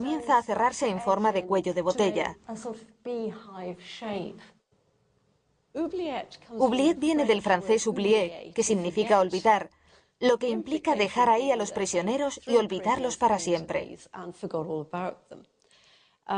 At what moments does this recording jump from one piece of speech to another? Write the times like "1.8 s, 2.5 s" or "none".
none